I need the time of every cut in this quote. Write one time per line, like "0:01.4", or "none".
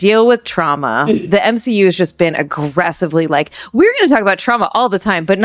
0:01.2